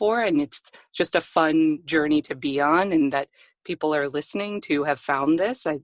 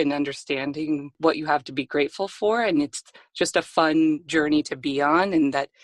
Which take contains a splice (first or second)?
second